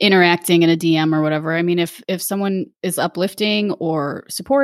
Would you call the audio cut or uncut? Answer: cut